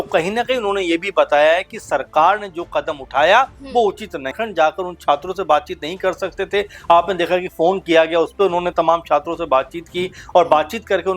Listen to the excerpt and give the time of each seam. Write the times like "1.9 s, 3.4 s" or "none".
4.3 s